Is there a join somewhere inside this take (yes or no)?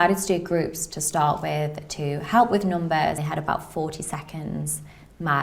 yes